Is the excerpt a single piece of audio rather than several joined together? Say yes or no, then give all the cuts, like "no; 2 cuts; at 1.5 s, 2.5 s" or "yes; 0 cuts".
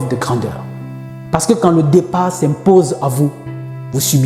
yes; 0 cuts